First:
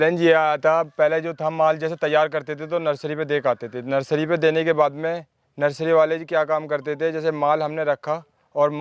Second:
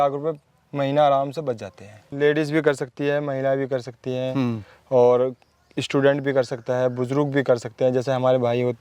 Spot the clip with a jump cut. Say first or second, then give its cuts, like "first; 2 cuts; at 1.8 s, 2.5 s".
second; 1 cut; at 2.0 s